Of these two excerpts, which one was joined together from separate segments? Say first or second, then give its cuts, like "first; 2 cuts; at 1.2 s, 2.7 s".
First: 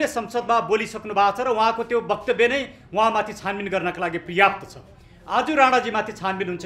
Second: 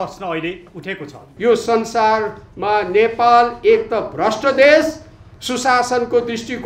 second; 1 cut; at 1.2 s